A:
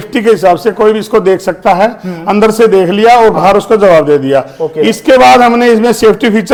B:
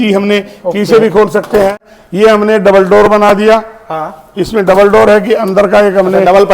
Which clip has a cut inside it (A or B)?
B